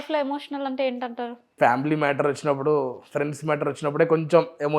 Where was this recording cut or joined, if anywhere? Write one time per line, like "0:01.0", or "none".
0:01.5